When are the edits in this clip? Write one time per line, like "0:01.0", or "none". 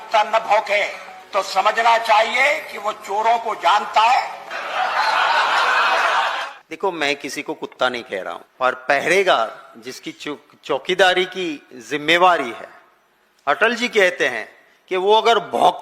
0:06.6
0:08.4